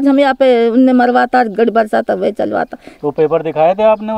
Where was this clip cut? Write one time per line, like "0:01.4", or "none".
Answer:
0:02.8

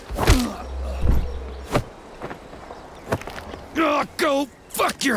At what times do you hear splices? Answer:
0:03.6

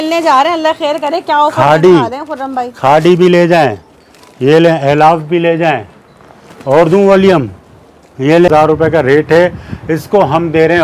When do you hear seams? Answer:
0:08.5

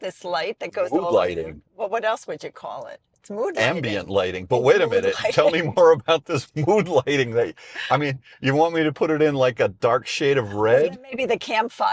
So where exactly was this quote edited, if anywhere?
none

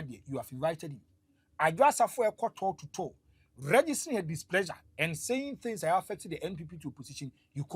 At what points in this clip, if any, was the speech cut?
none

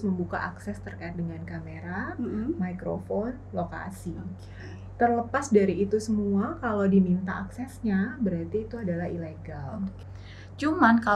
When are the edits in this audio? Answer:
0:10.0

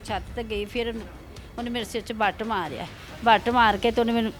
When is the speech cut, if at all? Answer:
none

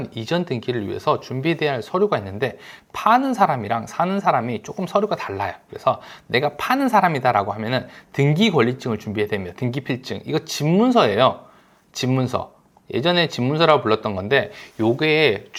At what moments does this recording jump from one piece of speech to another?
none

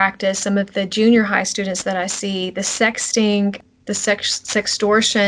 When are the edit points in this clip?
0:03.6

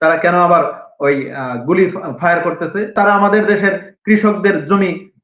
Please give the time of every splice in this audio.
0:02.9

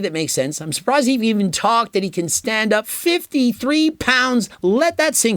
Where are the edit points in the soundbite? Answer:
0:02.9

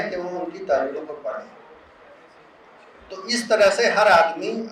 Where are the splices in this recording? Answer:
none

